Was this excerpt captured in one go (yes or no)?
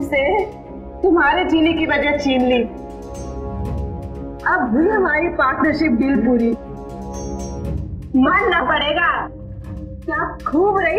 yes